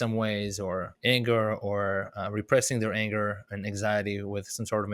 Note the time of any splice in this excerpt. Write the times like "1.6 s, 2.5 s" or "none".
0.9 s